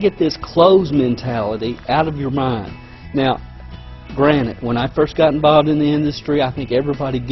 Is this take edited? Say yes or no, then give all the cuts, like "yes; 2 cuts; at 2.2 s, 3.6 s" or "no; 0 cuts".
no; 0 cuts